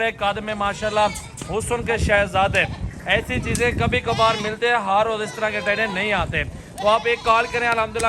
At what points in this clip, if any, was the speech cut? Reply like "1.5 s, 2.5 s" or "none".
none